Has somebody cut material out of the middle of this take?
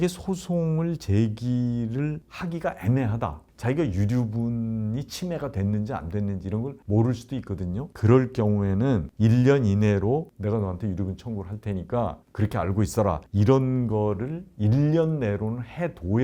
yes; 2 cuts; at 3.5 s, 10.3 s

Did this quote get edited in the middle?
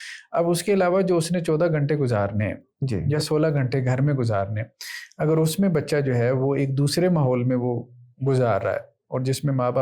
no; 0 cuts

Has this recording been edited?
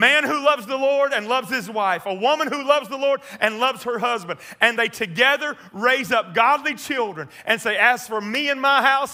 no; 0 cuts

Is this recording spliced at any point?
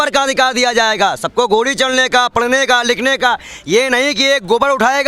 no; 0 cuts

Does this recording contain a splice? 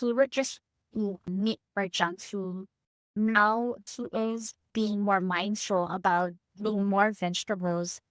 yes; 1 cut; at 3.1 s

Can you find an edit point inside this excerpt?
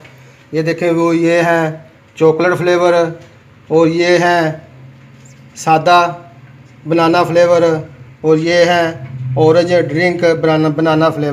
no; 0 cuts

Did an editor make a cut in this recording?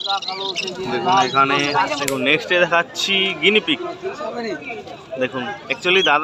yes; 1 cut; at 2.0 s

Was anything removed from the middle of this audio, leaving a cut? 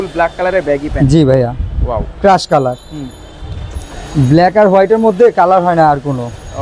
no; 0 cuts

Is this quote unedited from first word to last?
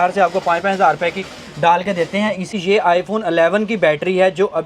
no; 1 cut; at 2.5 s

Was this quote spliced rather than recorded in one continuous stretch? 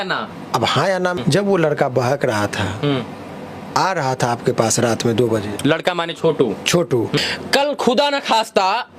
yes; 2 cuts; at 1.2 s, 7.2 s

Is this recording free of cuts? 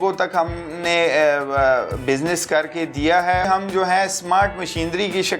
no; 1 cut; at 3.5 s

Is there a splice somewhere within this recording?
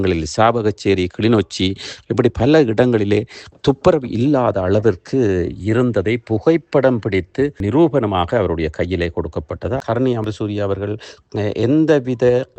yes; 1 cut; at 9.8 s

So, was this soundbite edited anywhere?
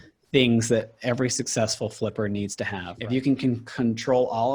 yes; 1 cut; at 2.9 s

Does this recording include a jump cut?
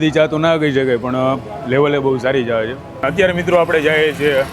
yes; 1 cut; at 3.0 s

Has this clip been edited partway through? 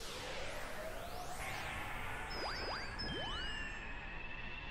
no; 0 cuts

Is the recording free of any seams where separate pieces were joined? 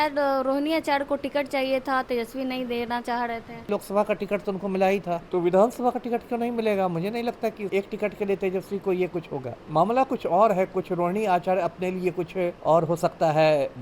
no; 5 cuts; at 3.7 s, 5.2 s, 7.7 s, 9.6 s, 12.6 s

